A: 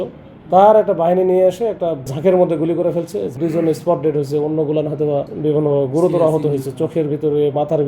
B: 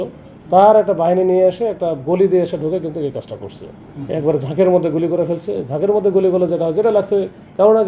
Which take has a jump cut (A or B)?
A